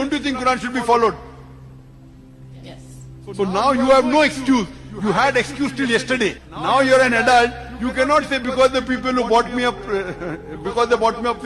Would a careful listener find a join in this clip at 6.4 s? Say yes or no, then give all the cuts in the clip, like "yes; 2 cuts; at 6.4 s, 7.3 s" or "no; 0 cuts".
yes; 1 cut; at 6.4 s